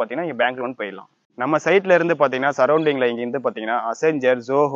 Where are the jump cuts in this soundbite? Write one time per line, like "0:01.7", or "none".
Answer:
0:01.2

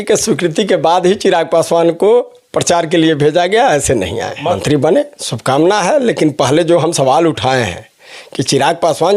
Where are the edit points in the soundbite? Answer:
0:04.6

